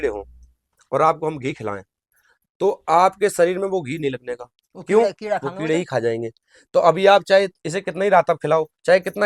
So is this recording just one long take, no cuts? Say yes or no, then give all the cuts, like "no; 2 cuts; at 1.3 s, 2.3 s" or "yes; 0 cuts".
yes; 0 cuts